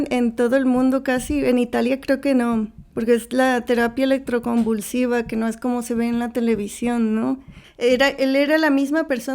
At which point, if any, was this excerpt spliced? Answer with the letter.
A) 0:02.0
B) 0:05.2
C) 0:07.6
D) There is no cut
C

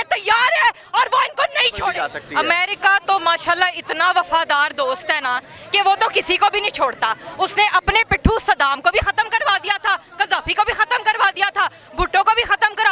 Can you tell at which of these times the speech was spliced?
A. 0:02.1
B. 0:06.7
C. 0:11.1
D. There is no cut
A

